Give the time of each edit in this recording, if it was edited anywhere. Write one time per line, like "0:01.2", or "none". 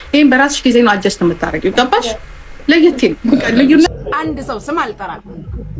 0:03.9